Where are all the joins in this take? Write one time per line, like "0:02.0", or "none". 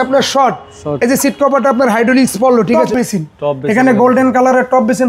0:02.9